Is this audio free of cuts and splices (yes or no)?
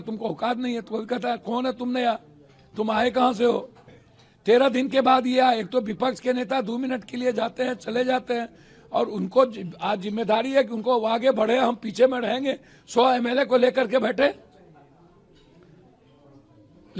yes